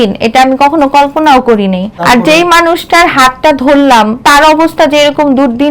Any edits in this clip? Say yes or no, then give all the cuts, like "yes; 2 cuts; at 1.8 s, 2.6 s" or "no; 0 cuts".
yes; 2 cuts; at 1.9 s, 4.2 s